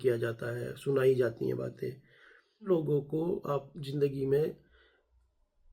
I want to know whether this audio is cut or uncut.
cut